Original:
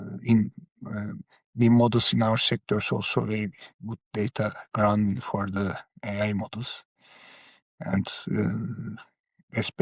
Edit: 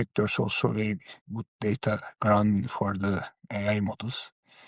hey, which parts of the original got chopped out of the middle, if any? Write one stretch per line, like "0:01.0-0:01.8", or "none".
none